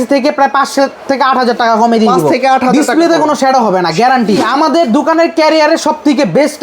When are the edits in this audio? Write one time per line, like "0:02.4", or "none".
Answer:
0:04.4